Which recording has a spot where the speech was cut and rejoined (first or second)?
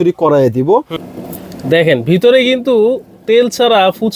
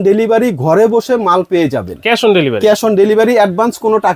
first